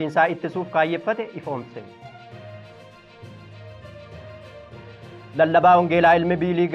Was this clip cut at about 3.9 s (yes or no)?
no